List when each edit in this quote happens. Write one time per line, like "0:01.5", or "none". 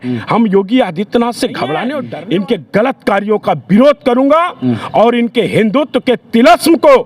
0:02.0